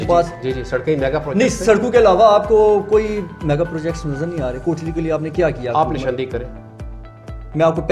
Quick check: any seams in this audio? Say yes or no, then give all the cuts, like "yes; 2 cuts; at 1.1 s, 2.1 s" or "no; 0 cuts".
no; 0 cuts